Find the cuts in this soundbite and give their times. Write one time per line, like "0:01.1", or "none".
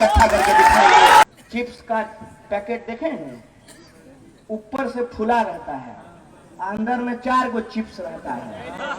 0:01.2